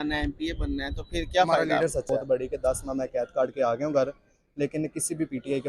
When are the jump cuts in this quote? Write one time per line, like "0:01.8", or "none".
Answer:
0:02.1